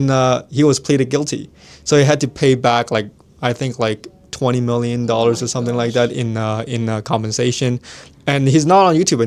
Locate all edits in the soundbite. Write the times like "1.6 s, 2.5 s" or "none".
none